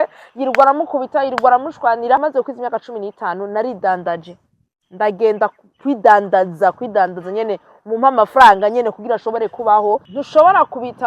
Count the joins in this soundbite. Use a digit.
2